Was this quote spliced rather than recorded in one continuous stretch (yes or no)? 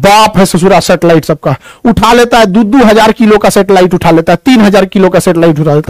no